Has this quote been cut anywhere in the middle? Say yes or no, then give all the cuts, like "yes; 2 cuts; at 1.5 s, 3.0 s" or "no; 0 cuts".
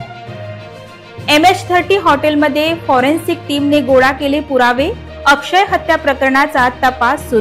no; 0 cuts